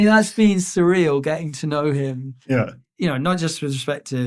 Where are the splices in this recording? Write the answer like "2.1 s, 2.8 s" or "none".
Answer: 2.8 s